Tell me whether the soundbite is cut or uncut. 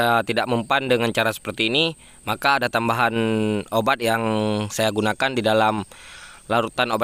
uncut